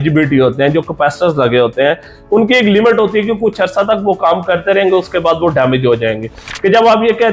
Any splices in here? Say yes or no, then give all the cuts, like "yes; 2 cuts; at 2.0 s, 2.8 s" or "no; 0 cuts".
no; 0 cuts